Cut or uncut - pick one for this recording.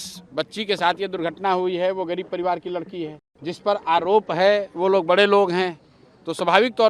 cut